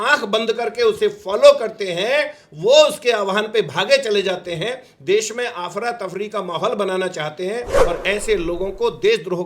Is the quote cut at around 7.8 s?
yes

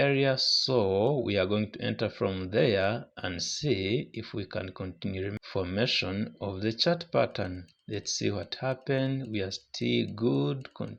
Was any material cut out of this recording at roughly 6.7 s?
no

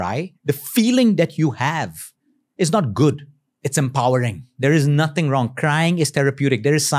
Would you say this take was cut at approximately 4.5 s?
yes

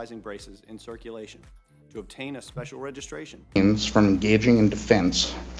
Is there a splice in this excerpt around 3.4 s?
yes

